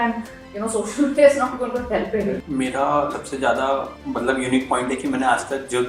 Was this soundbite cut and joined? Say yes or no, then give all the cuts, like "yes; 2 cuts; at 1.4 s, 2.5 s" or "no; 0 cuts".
yes; 3 cuts; at 2.4 s, 3.1 s, 4.0 s